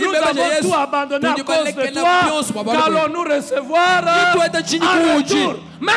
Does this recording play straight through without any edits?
yes; 0 cuts

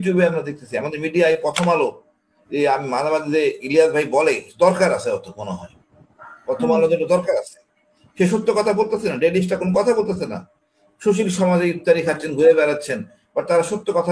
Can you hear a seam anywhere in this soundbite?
no; 0 cuts

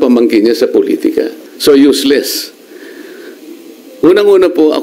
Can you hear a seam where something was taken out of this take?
yes; 1 cut; at 1.4 s

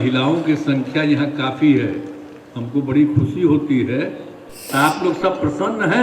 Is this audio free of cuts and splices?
no; 1 cut; at 4.6 s

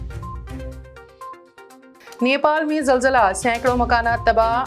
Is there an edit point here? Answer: yes; 1 cut; at 1.8 s

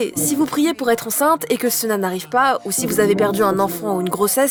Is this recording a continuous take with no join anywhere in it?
yes; 0 cuts

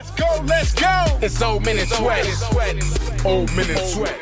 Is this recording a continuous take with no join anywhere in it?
no; 1 cut; at 3.0 s

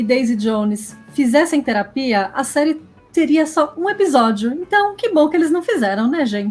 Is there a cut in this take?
no; 0 cuts

